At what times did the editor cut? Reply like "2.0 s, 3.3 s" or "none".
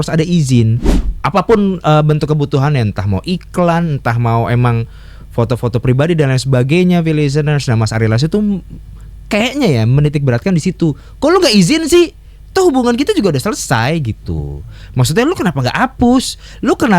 1.0 s